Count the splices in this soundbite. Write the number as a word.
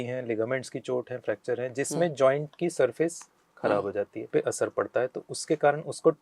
one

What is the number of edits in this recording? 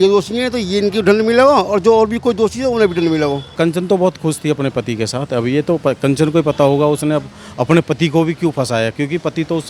one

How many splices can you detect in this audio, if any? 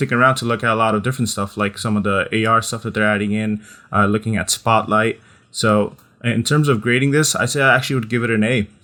zero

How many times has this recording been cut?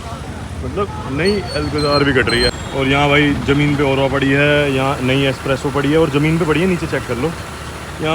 one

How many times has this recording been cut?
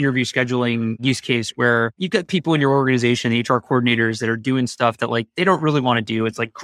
two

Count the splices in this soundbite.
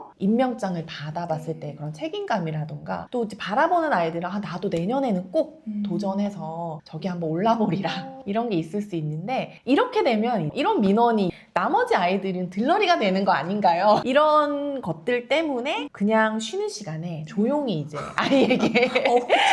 zero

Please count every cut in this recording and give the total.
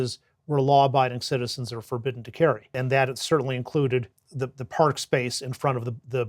two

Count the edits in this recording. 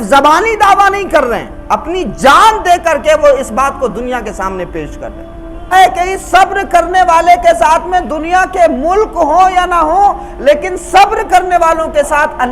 one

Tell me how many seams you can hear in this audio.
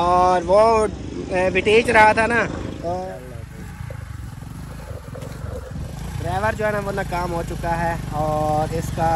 one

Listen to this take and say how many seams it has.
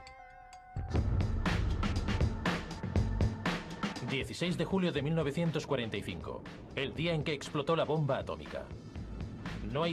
one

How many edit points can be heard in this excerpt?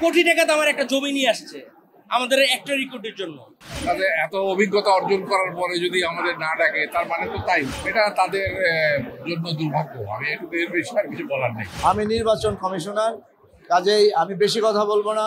three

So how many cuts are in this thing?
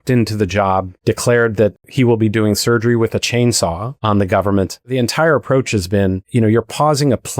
four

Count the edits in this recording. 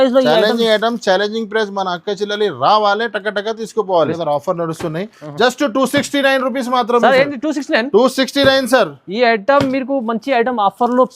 one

